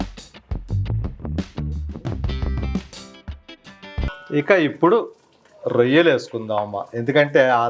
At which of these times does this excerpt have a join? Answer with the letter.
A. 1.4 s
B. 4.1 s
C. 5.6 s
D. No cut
B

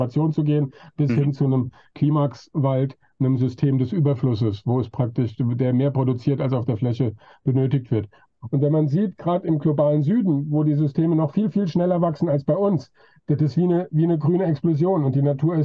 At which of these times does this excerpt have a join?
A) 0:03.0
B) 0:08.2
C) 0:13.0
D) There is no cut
B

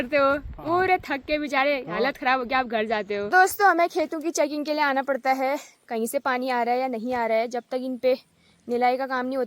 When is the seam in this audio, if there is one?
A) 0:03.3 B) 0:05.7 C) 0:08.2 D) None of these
A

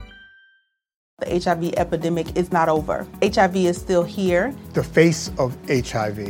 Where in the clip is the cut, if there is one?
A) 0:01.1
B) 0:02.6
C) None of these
A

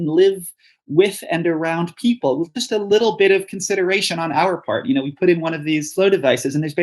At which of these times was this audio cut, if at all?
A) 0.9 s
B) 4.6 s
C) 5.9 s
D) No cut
C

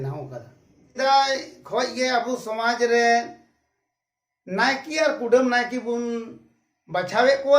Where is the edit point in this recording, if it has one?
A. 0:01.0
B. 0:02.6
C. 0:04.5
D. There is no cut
A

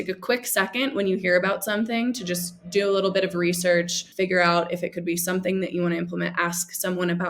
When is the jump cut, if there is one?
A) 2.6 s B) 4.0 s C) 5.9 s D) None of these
B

